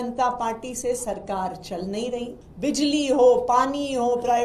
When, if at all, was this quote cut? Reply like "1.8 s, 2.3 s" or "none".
2.4 s